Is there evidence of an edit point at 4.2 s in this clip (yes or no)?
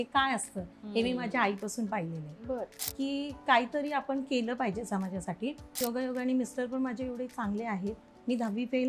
no